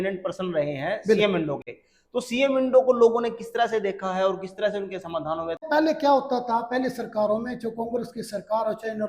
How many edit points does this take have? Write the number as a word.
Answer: one